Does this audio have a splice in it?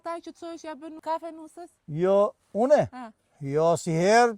yes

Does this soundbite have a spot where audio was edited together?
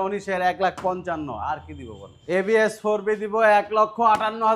yes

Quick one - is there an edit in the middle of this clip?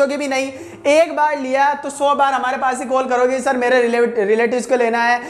no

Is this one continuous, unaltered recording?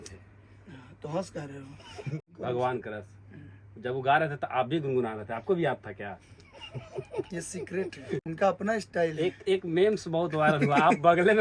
no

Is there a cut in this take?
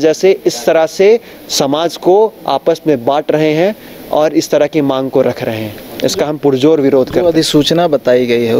no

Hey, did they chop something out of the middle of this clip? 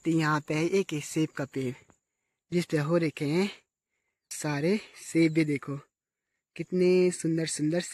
no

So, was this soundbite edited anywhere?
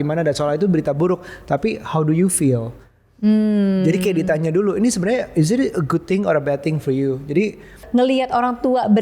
yes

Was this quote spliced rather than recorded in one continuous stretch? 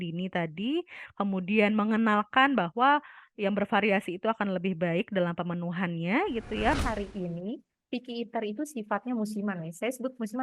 yes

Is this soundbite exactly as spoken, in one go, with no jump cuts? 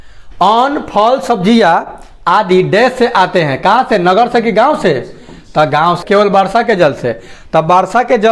no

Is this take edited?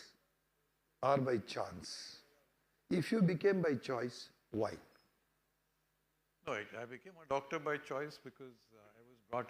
no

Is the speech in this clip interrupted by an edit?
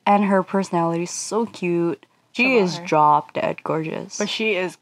yes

